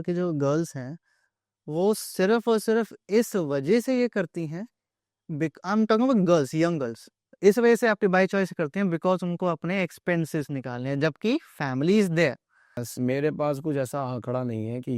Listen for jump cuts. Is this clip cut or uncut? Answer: cut